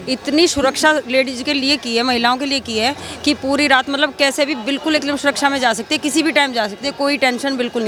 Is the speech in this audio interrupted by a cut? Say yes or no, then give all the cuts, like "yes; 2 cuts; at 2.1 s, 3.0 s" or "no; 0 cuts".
no; 0 cuts